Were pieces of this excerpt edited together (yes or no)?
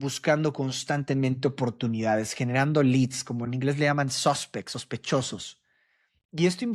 no